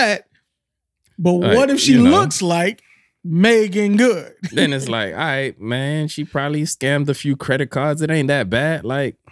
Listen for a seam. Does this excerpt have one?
yes; 1 cut; at 4.6 s

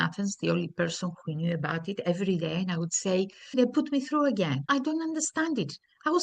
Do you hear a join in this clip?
yes; 2 cuts; at 3.5 s, 4.7 s

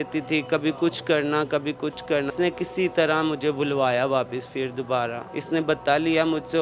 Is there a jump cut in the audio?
yes; 2 cuts; at 2.3 s, 5.3 s

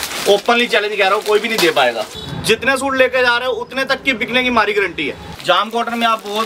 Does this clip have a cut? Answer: yes; 2 cuts; at 2.1 s, 5.2 s

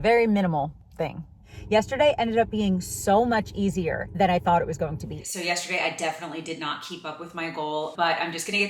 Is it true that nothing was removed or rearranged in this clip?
no; 2 cuts; at 1.4 s, 5.2 s

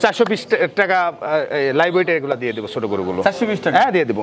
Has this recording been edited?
no; 0 cuts

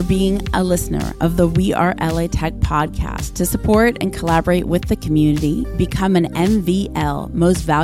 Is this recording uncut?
yes; 0 cuts

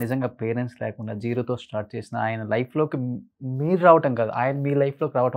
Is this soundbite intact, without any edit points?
yes; 0 cuts

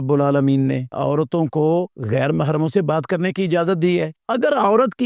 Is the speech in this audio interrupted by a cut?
yes; 3 cuts; at 0.9 s, 2.0 s, 4.2 s

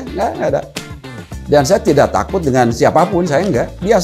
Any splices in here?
no; 0 cuts

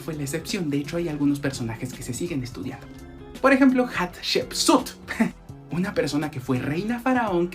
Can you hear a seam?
yes; 1 cut; at 5.1 s

